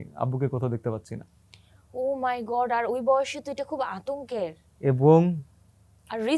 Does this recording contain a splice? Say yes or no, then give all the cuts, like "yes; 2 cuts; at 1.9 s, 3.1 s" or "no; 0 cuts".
no; 0 cuts